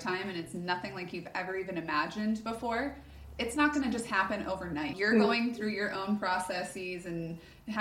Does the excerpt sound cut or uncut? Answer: cut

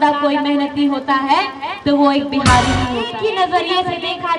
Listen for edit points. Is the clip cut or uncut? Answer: cut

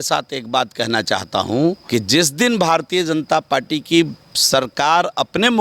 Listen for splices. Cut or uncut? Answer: cut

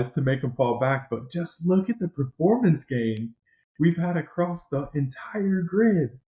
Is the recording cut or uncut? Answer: uncut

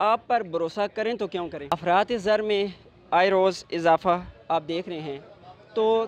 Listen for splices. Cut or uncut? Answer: cut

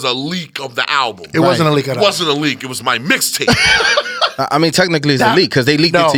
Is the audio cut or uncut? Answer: uncut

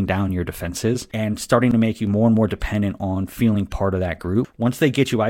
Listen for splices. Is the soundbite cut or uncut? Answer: cut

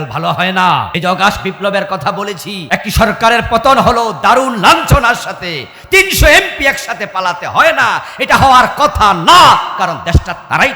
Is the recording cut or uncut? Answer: cut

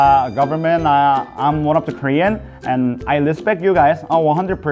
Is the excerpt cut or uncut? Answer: uncut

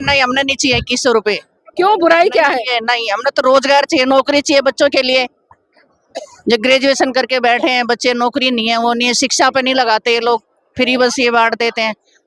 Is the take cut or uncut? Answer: uncut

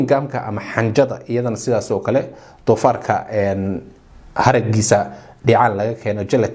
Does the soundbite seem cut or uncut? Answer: uncut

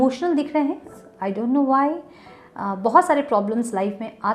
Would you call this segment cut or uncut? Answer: cut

